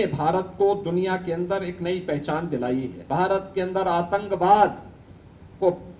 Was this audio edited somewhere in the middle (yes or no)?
yes